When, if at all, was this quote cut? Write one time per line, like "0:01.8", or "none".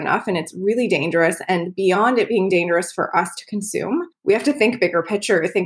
0:04.1